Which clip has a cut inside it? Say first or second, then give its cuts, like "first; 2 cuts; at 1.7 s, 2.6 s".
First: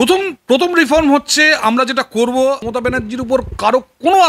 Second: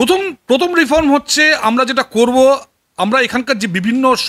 first; 1 cut; at 2.7 s